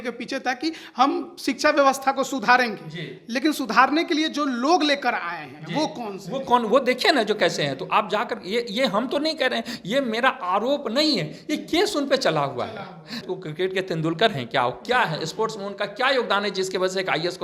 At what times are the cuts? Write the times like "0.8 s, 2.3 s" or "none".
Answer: 13.2 s